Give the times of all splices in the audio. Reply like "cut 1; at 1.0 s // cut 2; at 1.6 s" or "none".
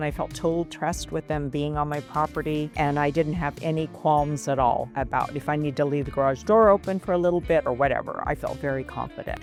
none

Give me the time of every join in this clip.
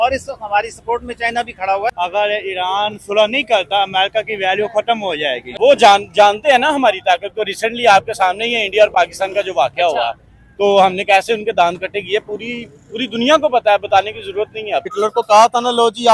cut 1; at 1.9 s // cut 2; at 5.5 s // cut 3; at 14.9 s

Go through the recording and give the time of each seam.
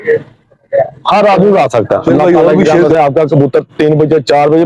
cut 1; at 2.7 s

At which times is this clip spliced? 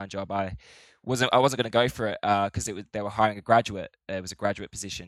none

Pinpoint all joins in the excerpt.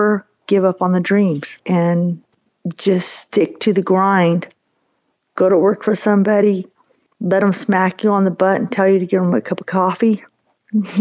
cut 1; at 1.6 s

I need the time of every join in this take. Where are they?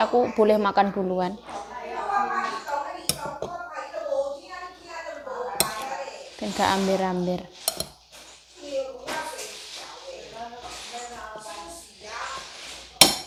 none

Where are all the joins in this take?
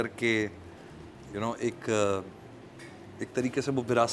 none

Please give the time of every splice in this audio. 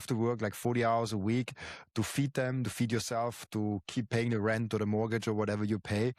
none

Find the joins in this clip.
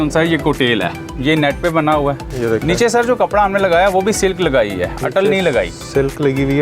cut 1; at 1.0 s // cut 2; at 2.3 s

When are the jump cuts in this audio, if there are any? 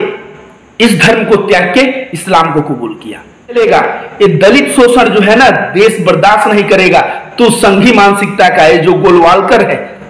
cut 1; at 3.6 s

